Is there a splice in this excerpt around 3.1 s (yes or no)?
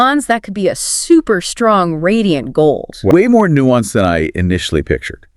yes